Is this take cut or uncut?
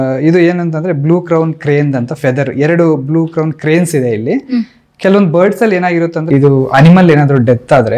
cut